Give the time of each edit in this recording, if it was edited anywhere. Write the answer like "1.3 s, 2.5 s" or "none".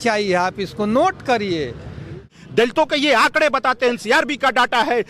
2.4 s